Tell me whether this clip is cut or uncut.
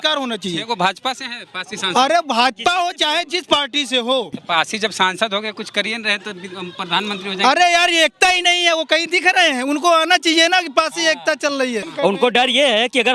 cut